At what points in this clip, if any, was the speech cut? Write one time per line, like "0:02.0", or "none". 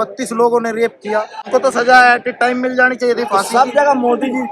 0:01.4